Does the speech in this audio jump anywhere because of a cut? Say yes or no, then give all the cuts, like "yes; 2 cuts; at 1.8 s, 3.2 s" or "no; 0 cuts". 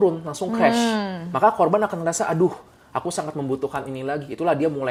no; 0 cuts